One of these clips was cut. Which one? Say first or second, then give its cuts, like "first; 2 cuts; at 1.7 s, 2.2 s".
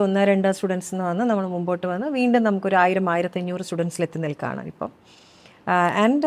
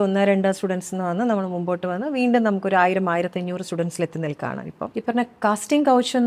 second; 1 cut; at 4.9 s